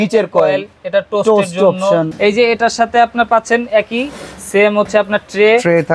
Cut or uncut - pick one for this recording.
cut